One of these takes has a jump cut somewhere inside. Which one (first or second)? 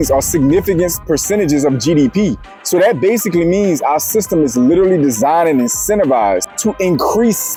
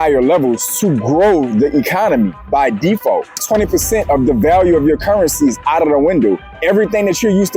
second